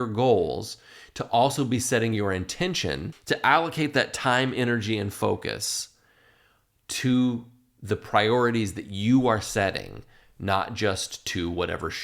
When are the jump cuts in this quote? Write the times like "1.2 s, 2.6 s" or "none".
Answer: 3.1 s